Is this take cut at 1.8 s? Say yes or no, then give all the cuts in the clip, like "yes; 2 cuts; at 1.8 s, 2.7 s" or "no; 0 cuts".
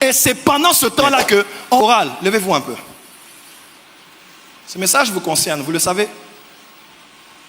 yes; 1 cut; at 1.8 s